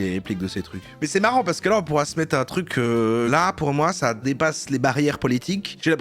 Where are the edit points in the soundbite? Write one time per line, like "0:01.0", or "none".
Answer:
0:00.9
0:03.3